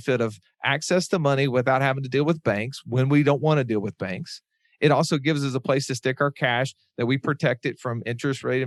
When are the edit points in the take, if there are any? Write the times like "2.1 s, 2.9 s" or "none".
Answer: none

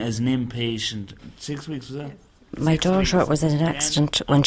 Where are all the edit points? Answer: 1.2 s, 2.6 s

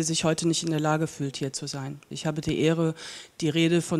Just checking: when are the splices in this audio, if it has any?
2.1 s

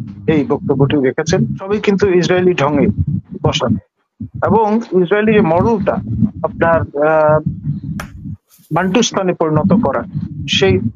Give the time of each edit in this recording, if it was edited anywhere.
1.6 s

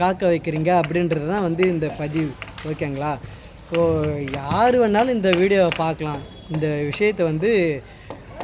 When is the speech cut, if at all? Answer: none

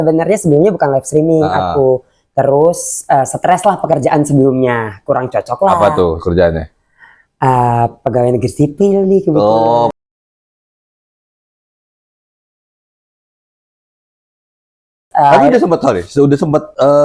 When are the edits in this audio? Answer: none

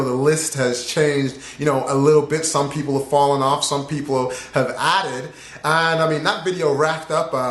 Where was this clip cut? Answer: 3.2 s

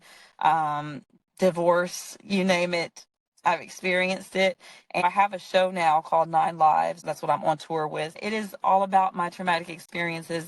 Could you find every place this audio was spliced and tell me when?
5.0 s, 7.0 s, 8.2 s

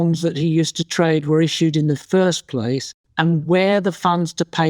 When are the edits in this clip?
3.0 s

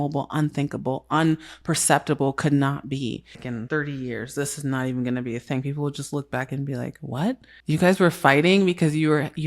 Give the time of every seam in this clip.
3.3 s, 7.5 s

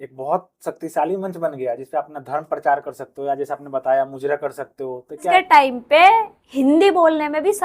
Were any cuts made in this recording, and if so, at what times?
5.3 s

